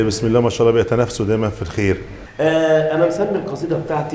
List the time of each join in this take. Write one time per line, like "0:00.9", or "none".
0:02.2